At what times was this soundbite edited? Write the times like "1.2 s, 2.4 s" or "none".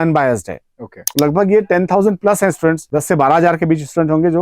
1.0 s, 2.8 s